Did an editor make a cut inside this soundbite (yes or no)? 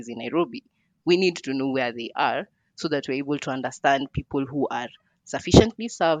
no